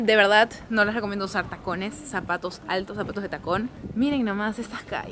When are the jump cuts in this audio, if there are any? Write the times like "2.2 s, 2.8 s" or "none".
none